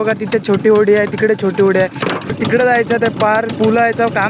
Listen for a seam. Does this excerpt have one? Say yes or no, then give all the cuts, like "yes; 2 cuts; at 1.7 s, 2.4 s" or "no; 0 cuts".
yes; 1 cut; at 2.3 s